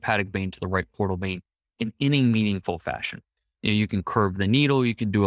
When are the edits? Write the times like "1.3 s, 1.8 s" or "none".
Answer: none